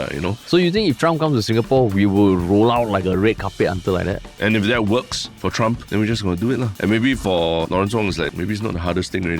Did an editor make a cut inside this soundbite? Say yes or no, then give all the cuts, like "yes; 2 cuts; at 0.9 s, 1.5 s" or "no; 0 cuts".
yes; 4 cuts; at 4.3 s, 5.5 s, 6.7 s, 8.2 s